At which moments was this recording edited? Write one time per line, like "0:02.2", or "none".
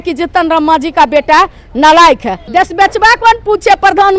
0:02.3